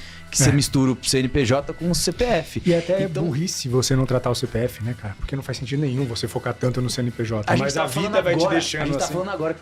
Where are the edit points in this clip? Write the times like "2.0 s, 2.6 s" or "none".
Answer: none